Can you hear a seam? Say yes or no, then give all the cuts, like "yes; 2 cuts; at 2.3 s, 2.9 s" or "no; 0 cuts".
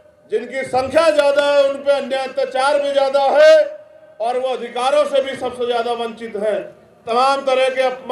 yes; 1 cut; at 7.0 s